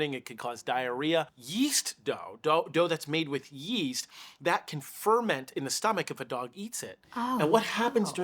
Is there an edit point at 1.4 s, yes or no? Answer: yes